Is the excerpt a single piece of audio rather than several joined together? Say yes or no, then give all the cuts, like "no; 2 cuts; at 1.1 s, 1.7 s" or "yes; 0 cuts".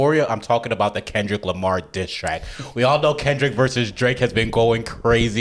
yes; 0 cuts